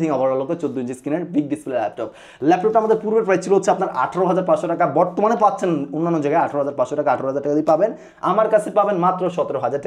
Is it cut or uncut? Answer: uncut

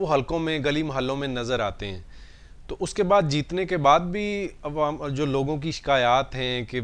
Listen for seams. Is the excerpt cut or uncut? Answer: uncut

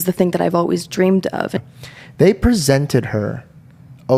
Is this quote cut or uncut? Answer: cut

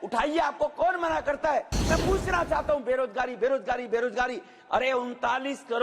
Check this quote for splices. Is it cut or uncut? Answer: cut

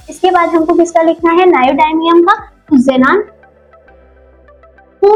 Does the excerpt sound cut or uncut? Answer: uncut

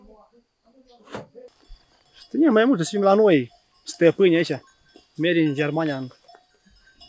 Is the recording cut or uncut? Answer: cut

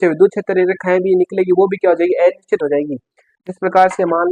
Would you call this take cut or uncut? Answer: uncut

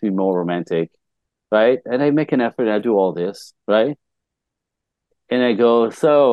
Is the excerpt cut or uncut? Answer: uncut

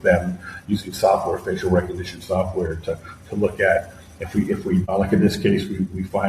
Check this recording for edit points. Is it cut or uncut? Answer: cut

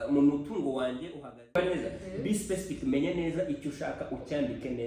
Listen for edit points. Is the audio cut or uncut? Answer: cut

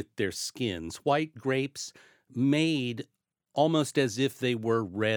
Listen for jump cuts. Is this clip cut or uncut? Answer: uncut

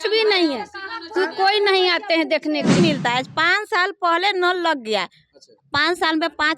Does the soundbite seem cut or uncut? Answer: cut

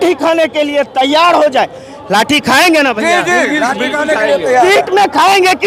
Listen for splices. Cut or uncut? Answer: uncut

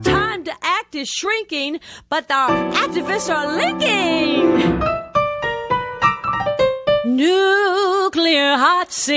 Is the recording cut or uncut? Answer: uncut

